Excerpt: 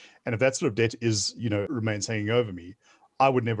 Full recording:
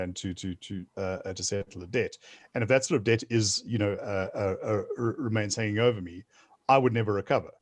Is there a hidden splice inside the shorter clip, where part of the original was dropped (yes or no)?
yes